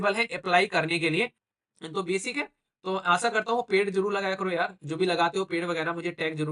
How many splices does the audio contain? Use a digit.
1